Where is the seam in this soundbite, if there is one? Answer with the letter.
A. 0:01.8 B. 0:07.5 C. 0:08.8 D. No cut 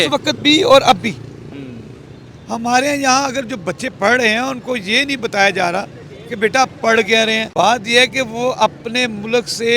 B